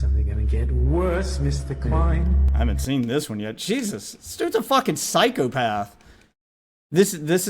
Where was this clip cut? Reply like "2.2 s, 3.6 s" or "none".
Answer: 2.4 s